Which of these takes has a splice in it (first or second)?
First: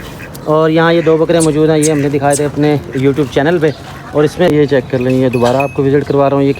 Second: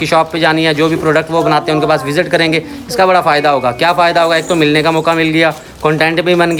first